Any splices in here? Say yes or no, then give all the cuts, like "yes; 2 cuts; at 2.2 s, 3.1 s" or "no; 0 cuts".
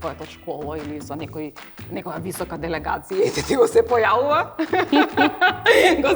no; 0 cuts